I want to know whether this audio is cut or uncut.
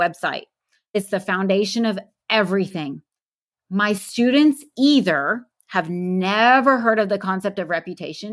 cut